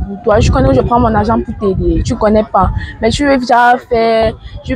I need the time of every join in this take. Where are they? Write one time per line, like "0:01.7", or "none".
none